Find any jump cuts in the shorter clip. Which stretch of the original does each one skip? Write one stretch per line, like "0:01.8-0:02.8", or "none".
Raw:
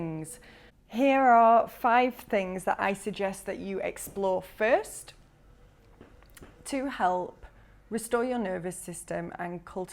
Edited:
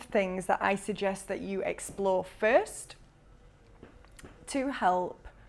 none